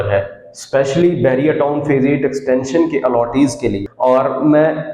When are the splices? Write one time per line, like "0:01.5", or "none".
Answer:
0:03.9